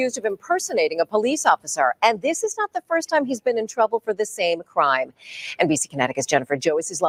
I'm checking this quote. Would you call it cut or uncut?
uncut